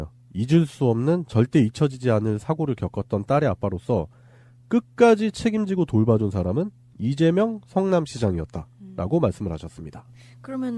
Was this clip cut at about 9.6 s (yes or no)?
yes